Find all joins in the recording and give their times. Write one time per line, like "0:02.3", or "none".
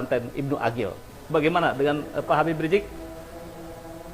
0:01.0